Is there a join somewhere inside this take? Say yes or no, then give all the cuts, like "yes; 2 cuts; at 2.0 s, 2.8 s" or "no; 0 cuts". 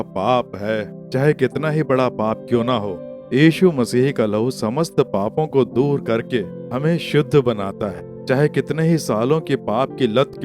no; 0 cuts